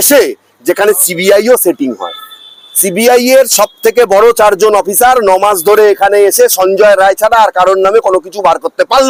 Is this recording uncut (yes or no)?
yes